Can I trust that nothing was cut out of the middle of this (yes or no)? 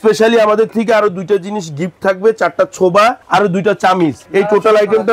yes